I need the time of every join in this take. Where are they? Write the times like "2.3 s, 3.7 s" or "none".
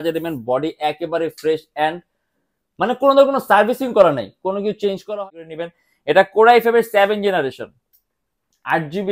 5.1 s